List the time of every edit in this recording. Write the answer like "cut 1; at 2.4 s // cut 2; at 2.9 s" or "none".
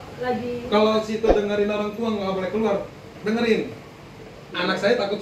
none